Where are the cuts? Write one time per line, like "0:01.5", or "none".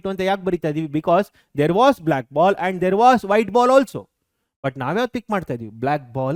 none